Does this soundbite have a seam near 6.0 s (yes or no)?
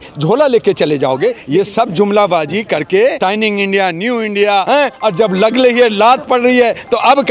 no